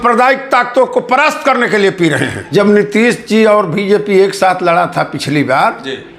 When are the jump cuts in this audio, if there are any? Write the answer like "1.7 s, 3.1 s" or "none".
2.3 s